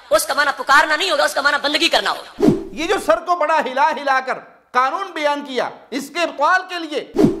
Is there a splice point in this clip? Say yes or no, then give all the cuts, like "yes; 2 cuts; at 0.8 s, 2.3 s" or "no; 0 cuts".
no; 0 cuts